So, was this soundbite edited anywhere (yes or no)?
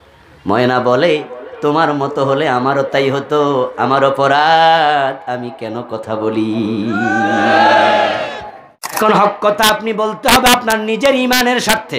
yes